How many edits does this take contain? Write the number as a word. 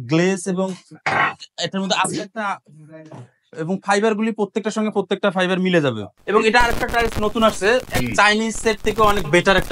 one